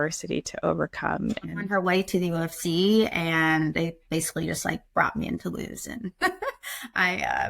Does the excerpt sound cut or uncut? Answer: cut